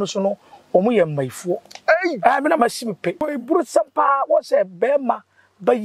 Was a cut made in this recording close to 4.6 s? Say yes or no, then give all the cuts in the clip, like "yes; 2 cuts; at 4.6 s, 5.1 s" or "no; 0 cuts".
no; 1 cut; at 3.3 s